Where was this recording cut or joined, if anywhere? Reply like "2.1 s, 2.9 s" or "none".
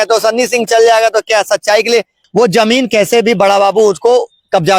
2.2 s